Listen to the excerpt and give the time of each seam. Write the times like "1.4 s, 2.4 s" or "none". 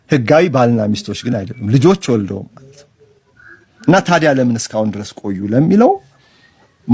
none